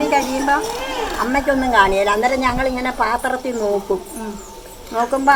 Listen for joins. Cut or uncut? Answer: uncut